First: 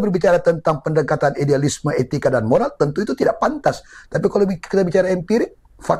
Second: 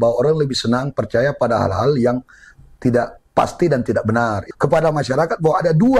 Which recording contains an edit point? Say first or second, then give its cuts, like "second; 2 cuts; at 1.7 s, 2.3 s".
second; 1 cut; at 4.4 s